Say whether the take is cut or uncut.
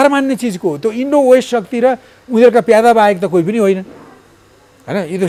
uncut